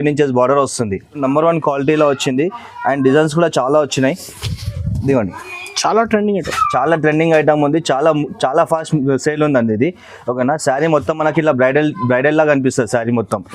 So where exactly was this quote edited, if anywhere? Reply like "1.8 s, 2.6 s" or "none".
1.2 s